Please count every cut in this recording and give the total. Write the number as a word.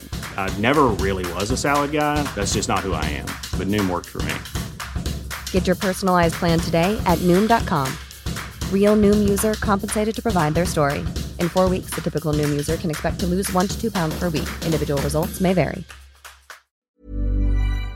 one